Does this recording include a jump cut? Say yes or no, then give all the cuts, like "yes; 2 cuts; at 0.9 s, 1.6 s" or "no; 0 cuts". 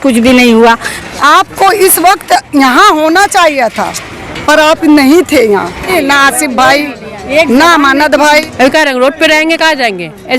yes; 3 cuts; at 0.9 s, 5.9 s, 8.5 s